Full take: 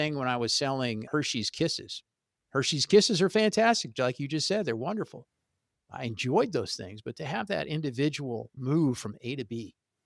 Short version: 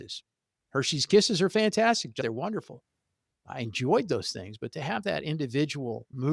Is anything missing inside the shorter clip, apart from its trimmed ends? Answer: yes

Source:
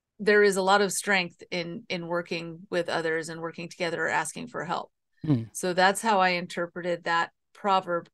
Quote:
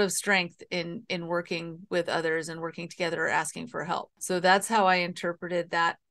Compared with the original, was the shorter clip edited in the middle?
yes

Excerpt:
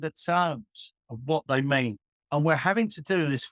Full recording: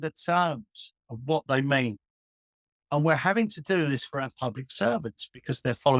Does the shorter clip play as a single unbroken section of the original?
no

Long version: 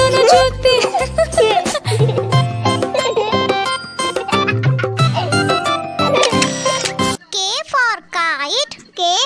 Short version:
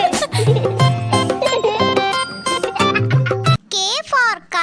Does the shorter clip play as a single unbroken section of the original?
no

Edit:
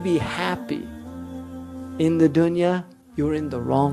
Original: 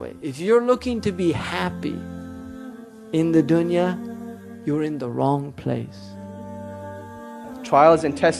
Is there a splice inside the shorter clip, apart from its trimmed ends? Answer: yes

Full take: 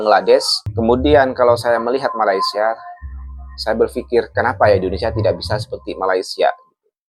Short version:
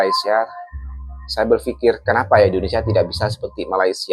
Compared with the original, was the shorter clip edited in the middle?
no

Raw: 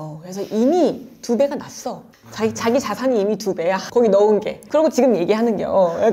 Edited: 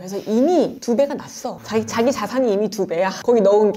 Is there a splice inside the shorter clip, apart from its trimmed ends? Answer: yes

